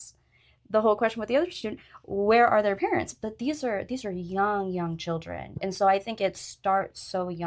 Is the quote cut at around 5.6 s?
yes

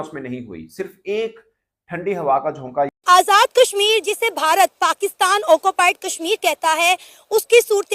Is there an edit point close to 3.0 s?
yes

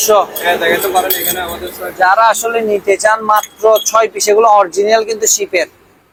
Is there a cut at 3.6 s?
no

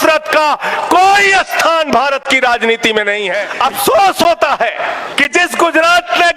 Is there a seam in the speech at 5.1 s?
yes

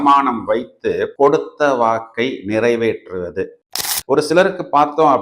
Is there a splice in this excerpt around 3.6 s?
yes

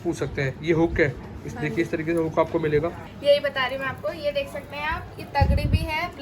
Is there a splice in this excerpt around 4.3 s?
no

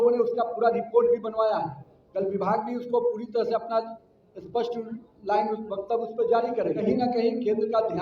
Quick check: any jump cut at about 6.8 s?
yes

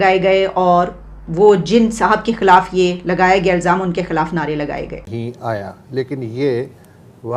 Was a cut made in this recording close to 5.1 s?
yes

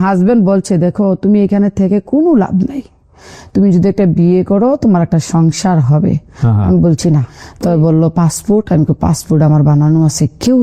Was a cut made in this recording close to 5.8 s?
no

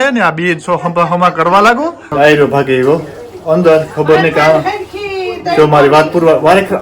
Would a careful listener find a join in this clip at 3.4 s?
no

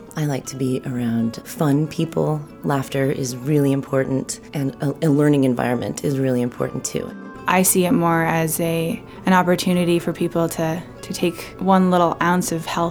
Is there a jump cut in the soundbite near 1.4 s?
yes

